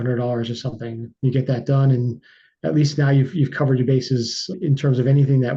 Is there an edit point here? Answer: no; 0 cuts

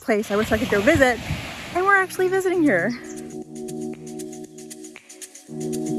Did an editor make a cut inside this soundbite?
no; 0 cuts

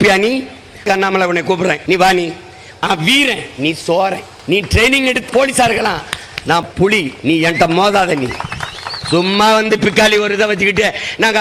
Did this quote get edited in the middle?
yes; 6 cuts; at 0.8 s, 1.8 s, 2.8 s, 4.3 s, 5.3 s, 6.7 s

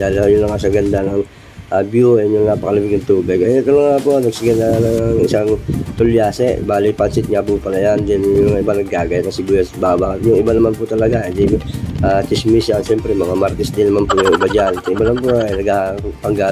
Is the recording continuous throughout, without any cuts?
yes; 0 cuts

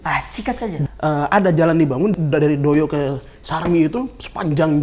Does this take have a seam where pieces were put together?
yes; 2 cuts; at 0.8 s, 2.1 s

